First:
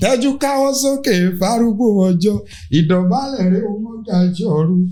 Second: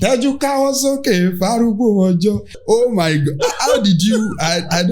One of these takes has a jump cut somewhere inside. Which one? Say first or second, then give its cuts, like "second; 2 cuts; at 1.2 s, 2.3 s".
second; 1 cut; at 2.5 s